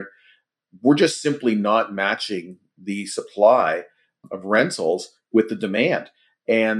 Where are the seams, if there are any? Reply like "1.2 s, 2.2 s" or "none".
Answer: 4.2 s